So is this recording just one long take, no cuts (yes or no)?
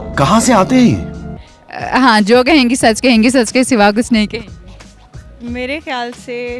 yes